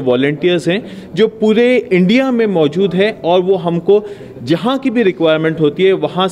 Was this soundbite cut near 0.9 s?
no; 0 cuts

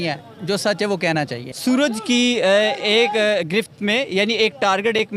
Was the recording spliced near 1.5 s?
yes; 1 cut; at 1.5 s

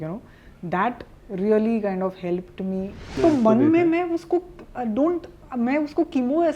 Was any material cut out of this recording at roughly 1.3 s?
no; 1 cut; at 3.1 s

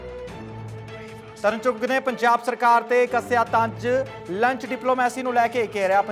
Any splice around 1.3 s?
yes; 1 cut; at 1.3 s

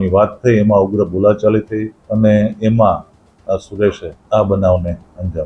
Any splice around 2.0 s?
yes; 2 cuts; at 2.0 s, 4.1 s

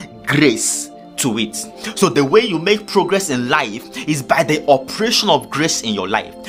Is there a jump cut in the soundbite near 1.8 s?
yes; 1 cut; at 1.8 s

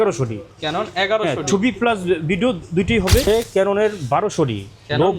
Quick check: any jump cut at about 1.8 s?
no; 1 cut; at 3.3 s

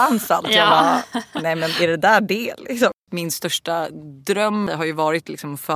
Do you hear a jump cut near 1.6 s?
no; 2 cuts; at 3.0 s, 4.6 s

